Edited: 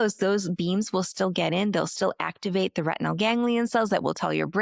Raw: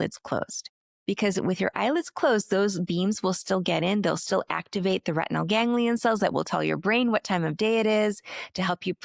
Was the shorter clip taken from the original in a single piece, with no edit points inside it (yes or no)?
yes